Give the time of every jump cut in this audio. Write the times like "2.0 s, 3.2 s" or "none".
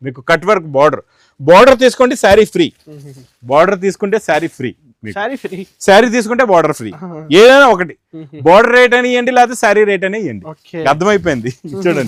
none